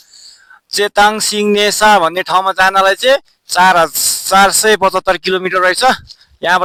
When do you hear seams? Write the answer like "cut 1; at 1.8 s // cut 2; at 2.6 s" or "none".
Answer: none

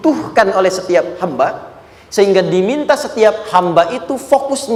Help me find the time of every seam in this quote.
none

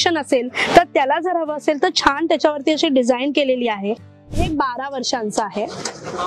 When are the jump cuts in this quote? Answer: cut 1; at 4.4 s

